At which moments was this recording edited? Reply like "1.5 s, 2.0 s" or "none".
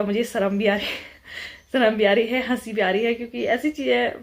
none